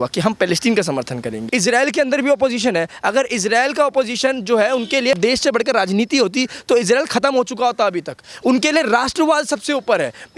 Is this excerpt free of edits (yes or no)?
no